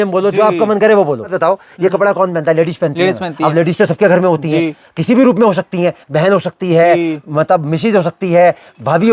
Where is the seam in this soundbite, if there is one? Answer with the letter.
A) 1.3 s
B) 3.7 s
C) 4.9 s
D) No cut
A